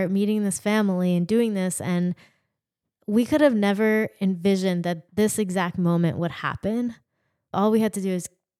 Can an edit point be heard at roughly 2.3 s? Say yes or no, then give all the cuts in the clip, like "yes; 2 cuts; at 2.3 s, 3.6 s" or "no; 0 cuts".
no; 2 cuts; at 5.0 s, 7.5 s